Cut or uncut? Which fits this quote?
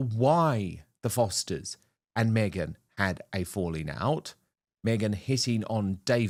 uncut